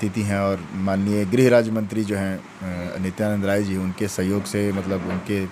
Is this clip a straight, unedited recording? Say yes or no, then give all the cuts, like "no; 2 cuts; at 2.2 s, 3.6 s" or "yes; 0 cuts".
yes; 0 cuts